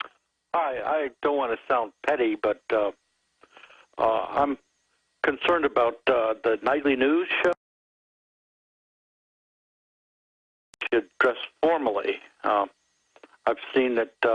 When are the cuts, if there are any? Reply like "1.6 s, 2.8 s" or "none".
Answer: none